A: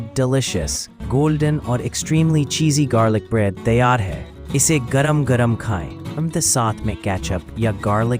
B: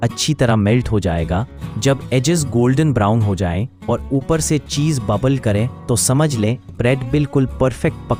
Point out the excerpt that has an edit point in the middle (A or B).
A